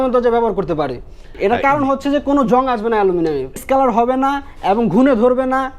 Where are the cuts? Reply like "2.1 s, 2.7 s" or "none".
1.4 s, 3.6 s